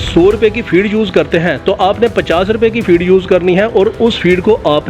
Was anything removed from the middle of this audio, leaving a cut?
no; 0 cuts

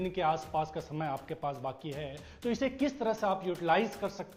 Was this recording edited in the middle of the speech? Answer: no; 0 cuts

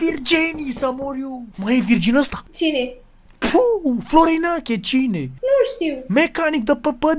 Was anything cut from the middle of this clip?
yes; 3 cuts; at 1.4 s, 2.4 s, 5.3 s

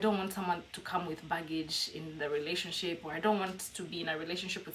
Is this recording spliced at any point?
no; 0 cuts

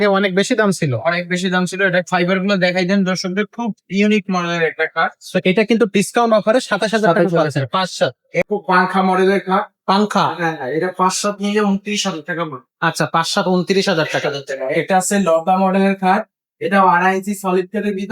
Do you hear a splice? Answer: yes; 1 cut; at 8.5 s

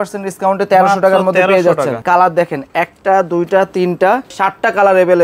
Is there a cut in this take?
yes; 2 cuts; at 2.0 s, 4.3 s

